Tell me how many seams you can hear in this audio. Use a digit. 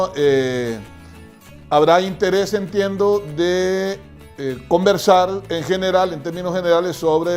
1